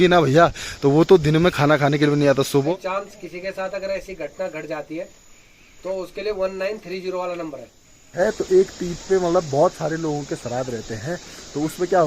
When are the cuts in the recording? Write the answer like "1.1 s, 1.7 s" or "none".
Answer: 2.7 s, 8.1 s